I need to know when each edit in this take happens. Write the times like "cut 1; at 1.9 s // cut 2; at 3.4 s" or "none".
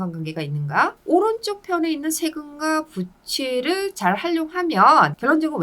cut 1; at 1.0 s